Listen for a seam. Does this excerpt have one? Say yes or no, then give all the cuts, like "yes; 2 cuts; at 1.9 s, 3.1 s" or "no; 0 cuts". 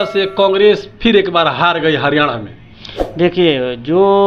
no; 0 cuts